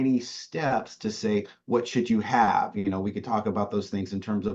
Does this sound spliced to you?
no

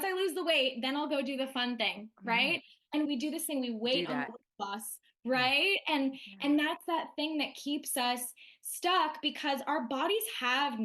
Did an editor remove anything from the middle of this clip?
yes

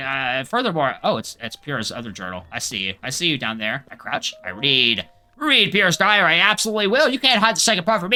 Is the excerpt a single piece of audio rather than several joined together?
yes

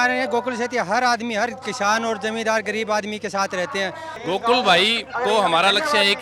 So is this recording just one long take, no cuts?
no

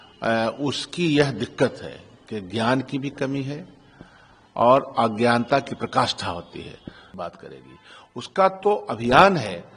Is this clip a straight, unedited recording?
no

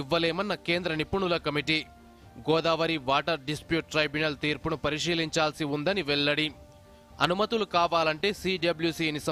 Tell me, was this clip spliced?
no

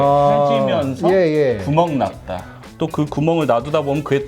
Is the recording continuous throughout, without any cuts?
no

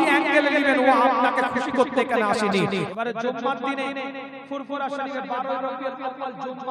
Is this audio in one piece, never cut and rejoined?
no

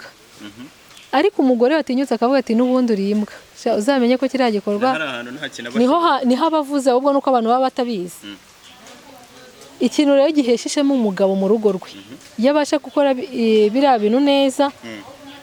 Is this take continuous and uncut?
yes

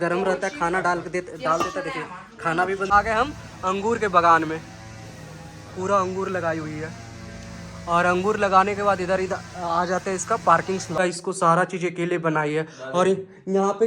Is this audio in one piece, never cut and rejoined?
no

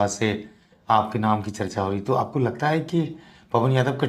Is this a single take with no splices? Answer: yes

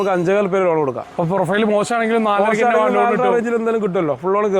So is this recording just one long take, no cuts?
no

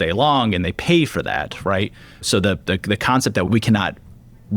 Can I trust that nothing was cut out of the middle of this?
no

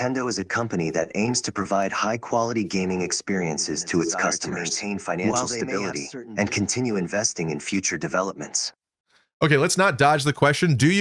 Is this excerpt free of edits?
yes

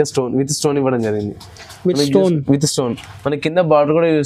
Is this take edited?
no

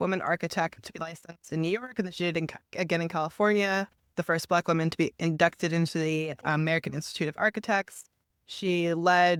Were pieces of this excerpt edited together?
no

